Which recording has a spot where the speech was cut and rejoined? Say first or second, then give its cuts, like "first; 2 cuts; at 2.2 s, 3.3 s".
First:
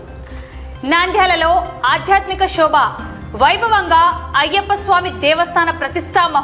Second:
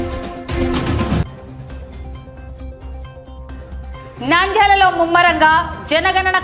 second; 2 cuts; at 1.2 s, 3.9 s